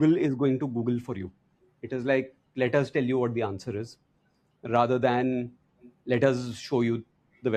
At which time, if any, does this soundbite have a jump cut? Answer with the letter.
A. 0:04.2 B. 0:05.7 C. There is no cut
C